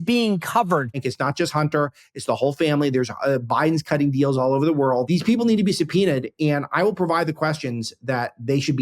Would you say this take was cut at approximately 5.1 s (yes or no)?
yes